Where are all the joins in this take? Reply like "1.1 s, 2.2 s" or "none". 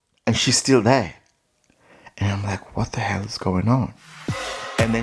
none